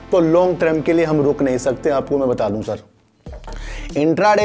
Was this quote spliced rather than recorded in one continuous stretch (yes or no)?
no